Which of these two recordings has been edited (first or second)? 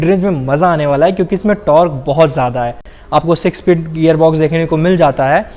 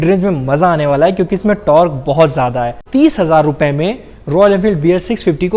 second